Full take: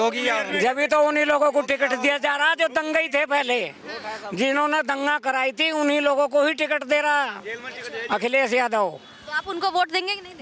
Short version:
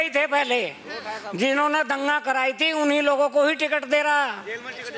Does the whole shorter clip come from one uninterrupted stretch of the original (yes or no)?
yes